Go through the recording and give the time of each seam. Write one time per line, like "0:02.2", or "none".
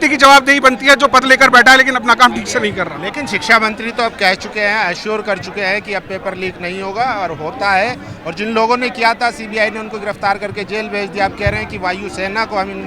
none